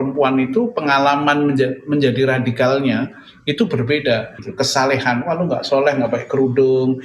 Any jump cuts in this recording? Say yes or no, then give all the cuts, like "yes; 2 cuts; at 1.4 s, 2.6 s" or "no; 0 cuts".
yes; 1 cut; at 4.4 s